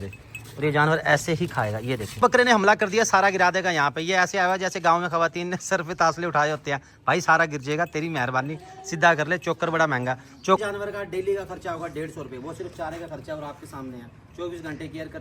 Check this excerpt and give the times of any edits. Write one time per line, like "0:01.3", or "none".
0:02.2
0:10.6